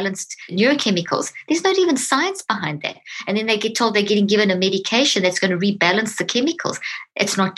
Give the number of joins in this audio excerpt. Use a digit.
0